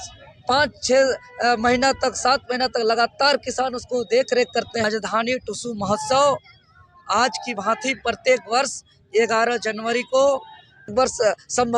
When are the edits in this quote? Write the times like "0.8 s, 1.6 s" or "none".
4.9 s, 10.9 s